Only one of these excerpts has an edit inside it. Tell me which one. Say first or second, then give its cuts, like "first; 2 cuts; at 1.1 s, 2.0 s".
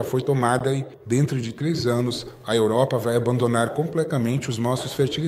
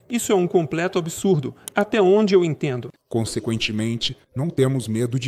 second; 1 cut; at 3.0 s